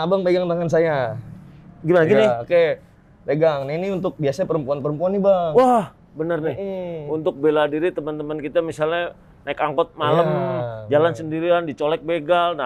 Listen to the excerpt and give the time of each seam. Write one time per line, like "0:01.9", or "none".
none